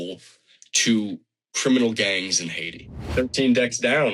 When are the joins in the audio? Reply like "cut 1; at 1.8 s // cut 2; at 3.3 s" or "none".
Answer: cut 1; at 3.1 s